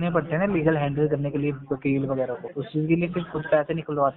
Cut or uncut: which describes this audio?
cut